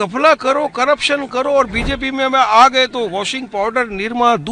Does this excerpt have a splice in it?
no; 0 cuts

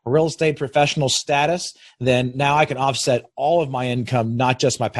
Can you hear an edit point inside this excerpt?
no; 0 cuts

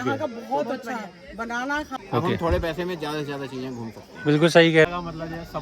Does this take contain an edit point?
yes; 2 cuts; at 1.9 s, 4.9 s

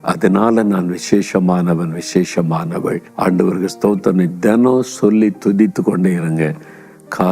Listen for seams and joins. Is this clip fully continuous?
no; 1 cut; at 3.1 s

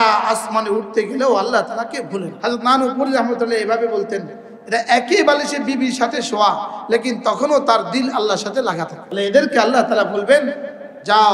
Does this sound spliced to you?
yes; 2 cuts; at 2.3 s, 9.0 s

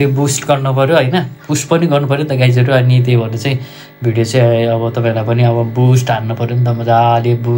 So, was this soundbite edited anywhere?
no; 0 cuts

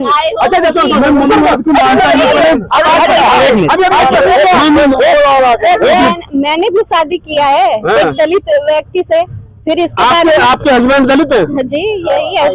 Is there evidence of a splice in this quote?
yes; 1 cut; at 6.0 s

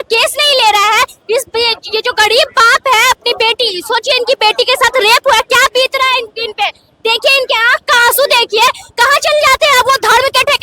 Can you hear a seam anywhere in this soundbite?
no; 0 cuts

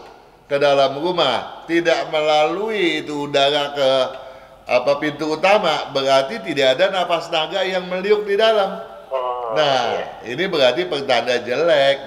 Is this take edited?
no; 0 cuts

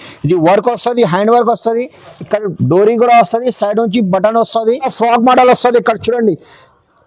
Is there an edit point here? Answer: yes; 1 cut; at 4.9 s

